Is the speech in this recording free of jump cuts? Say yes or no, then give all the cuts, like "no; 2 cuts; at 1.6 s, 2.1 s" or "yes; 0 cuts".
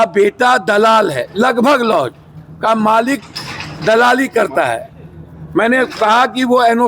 yes; 0 cuts